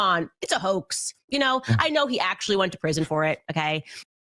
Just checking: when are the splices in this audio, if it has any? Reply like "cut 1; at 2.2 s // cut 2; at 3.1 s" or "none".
none